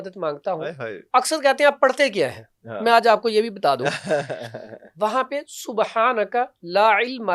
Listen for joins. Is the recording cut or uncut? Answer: uncut